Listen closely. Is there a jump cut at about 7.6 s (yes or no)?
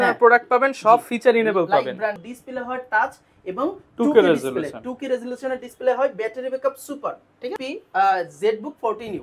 yes